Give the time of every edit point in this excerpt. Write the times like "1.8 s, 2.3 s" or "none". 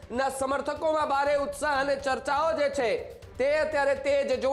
none